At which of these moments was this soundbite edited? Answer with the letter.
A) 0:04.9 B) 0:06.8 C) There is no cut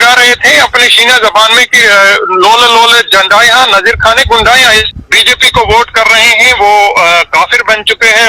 A